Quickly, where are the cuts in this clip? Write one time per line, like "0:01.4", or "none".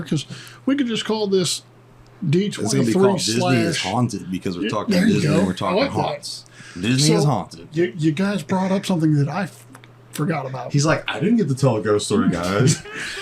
0:07.6